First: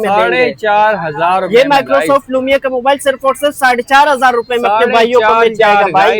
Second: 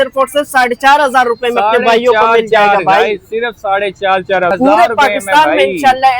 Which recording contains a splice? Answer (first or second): second